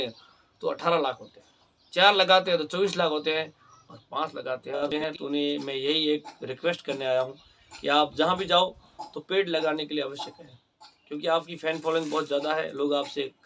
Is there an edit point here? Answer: yes; 1 cut; at 4.9 s

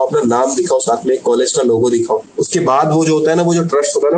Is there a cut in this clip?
yes; 1 cut; at 2.3 s

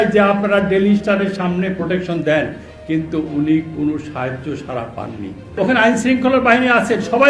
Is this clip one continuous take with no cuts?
no; 1 cut; at 5.6 s

